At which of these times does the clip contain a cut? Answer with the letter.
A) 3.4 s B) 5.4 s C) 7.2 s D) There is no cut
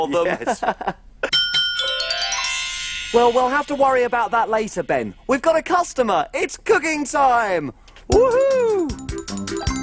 D